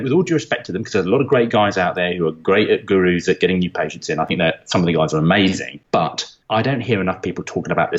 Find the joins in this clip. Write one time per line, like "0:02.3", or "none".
0:06.0